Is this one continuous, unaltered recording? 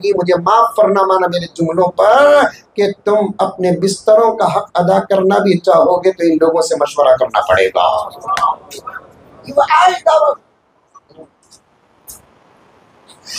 yes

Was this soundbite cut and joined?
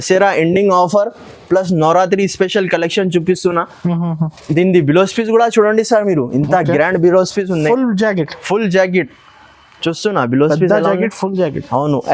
no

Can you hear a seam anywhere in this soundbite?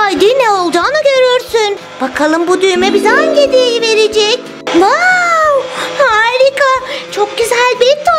yes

